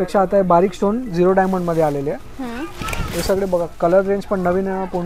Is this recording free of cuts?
yes; 0 cuts

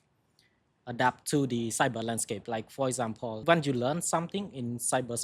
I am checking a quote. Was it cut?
yes; 1 cut; at 3.4 s

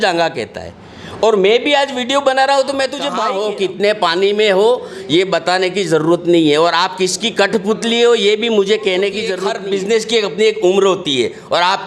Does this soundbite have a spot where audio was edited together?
yes; 2 cuts; at 3.2 s, 9.4 s

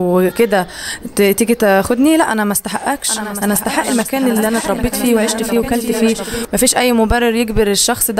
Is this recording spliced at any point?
yes; 1 cut; at 6.4 s

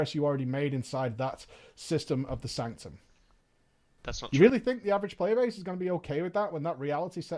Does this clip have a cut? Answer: no; 0 cuts

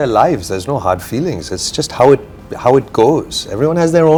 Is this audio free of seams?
yes; 0 cuts

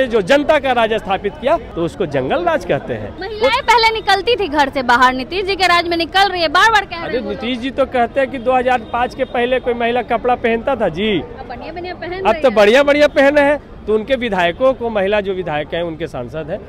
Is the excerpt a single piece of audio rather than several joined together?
no; 2 cuts; at 1.7 s, 3.2 s

